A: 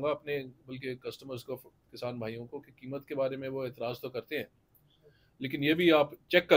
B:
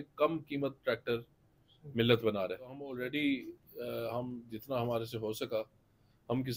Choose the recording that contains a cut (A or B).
B